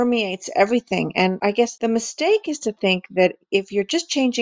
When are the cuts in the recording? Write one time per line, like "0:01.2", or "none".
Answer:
0:01.4